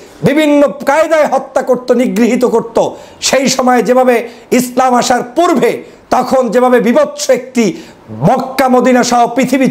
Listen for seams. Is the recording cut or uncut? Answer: uncut